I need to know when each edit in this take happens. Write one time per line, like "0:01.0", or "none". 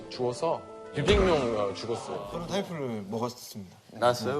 0:02.3